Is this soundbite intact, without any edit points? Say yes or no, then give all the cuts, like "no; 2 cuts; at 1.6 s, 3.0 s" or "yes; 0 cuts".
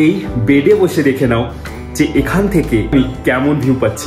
no; 1 cut; at 2.9 s